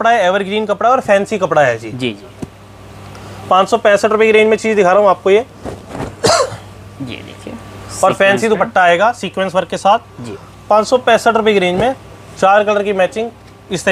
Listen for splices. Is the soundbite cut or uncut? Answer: uncut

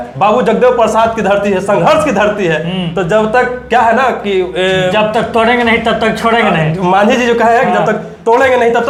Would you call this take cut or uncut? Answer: uncut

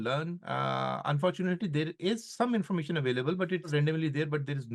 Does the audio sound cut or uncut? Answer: cut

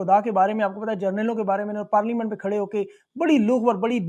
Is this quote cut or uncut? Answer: uncut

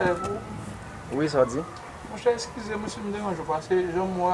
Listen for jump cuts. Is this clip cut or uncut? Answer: uncut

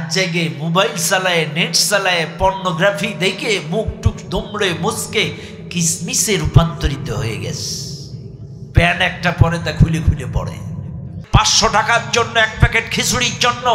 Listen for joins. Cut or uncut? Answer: cut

